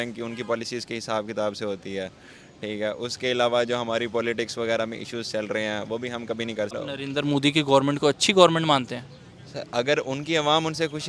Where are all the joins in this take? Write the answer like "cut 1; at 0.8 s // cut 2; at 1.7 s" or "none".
cut 1; at 6.7 s